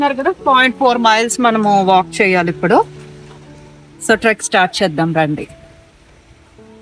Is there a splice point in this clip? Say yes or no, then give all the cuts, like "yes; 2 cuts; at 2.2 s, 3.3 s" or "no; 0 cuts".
no; 0 cuts